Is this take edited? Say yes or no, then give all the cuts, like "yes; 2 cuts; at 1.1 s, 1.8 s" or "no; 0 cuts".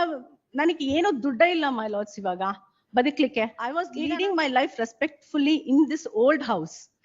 yes; 1 cut; at 3.8 s